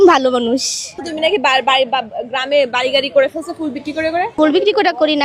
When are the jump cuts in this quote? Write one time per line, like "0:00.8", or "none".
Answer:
0:01.1
0:04.3